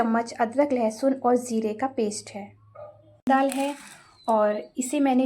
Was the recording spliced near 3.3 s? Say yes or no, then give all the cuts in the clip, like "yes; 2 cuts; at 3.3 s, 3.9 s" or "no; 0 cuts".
yes; 1 cut; at 3.3 s